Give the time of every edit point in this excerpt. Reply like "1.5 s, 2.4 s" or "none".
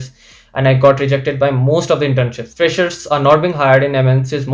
2.4 s